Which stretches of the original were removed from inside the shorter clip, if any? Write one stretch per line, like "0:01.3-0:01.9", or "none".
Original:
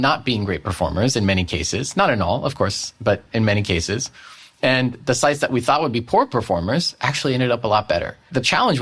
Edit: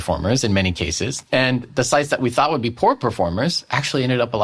0:01.8-0:04.4